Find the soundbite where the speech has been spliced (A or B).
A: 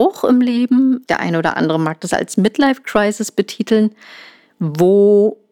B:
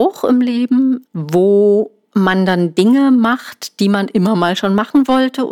B